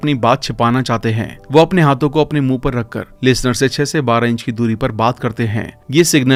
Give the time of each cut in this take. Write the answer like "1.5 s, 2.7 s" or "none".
none